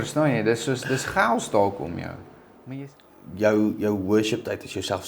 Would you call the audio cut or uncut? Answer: cut